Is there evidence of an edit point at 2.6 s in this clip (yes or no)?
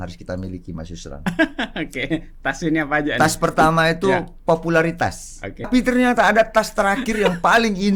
no